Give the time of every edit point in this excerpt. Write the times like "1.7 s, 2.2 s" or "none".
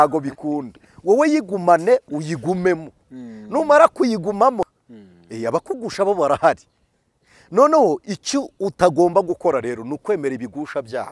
4.7 s